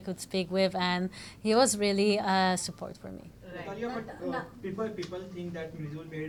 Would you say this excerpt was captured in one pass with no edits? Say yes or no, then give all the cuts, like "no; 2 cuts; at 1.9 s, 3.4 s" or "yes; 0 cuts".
yes; 0 cuts